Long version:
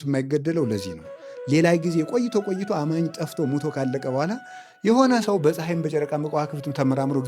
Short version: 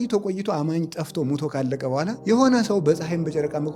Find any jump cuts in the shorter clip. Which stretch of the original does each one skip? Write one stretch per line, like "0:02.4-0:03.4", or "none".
0:04.4-0:04.8